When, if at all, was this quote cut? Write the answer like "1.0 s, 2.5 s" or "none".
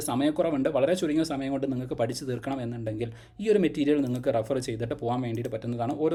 none